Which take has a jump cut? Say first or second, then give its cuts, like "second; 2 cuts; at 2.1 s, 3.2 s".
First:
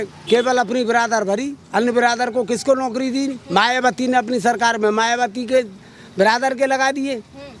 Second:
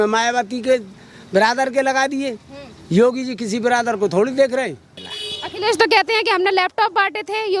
second; 1 cut; at 4.9 s